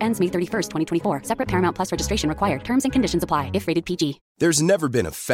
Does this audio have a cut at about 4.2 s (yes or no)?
yes